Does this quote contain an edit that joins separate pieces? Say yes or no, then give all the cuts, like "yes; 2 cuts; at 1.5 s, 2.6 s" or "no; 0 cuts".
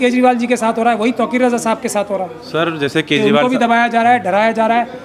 no; 0 cuts